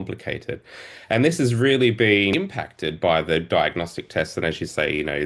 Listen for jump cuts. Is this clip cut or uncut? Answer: cut